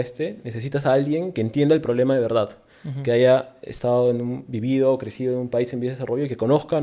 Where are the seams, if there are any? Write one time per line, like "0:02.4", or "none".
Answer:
none